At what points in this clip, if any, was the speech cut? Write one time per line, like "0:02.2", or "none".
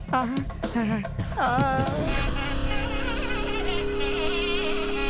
0:02.1